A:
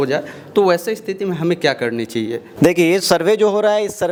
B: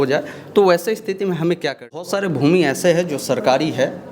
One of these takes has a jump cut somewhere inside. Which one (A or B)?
B